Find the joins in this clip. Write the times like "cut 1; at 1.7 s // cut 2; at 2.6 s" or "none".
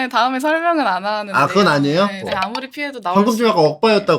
cut 1; at 2.3 s